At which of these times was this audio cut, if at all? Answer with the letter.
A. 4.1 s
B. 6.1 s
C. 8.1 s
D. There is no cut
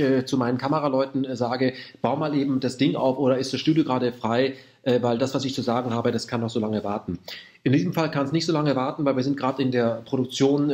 C